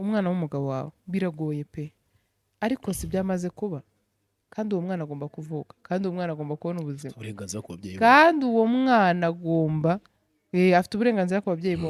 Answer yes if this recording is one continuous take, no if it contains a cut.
yes